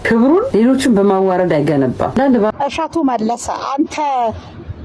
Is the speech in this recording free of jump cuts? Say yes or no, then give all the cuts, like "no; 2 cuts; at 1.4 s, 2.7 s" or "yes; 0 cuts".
no; 1 cut; at 2.5 s